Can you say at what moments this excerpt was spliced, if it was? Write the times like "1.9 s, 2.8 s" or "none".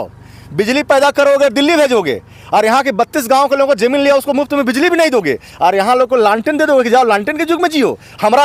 none